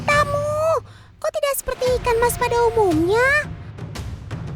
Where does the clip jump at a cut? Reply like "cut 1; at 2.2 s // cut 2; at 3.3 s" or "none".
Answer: none